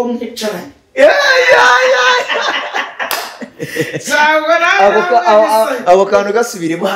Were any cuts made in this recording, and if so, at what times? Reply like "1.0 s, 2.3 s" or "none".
none